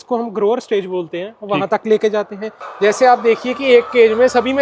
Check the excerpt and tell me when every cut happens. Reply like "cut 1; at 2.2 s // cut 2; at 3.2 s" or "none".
cut 1; at 2.7 s